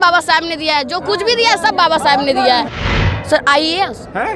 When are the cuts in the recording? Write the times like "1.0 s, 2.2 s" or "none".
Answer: 2.7 s